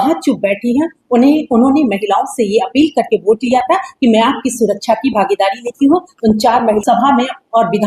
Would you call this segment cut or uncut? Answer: cut